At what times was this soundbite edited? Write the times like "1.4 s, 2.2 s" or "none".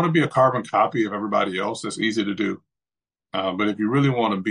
none